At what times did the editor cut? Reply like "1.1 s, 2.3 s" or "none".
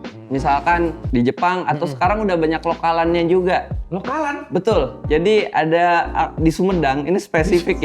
1.0 s, 5.0 s